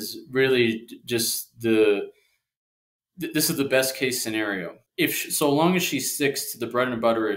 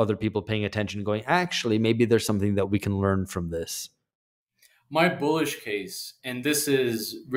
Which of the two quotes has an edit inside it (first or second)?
first